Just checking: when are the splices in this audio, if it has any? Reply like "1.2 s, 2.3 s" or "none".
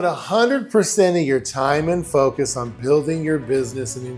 none